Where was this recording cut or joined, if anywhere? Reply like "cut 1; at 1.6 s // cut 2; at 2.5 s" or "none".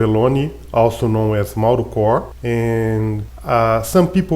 cut 1; at 2.3 s // cut 2; at 3.3 s